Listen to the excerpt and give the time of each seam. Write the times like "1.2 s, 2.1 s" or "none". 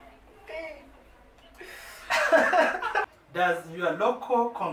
3.1 s